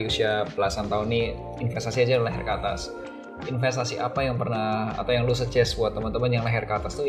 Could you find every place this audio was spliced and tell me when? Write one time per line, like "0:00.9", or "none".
none